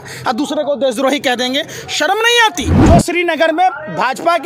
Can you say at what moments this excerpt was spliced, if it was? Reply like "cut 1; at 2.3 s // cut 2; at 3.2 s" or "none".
cut 1; at 2.8 s